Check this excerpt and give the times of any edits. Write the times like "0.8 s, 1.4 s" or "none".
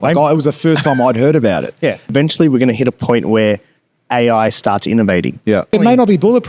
2.1 s, 5.7 s